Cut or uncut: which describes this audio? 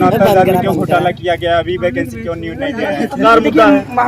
cut